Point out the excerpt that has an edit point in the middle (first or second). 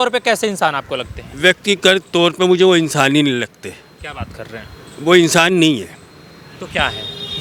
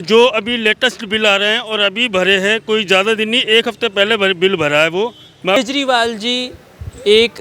second